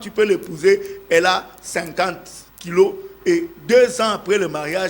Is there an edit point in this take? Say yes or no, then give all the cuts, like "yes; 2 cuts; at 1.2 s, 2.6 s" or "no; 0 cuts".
no; 0 cuts